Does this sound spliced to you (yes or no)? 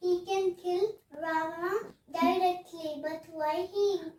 no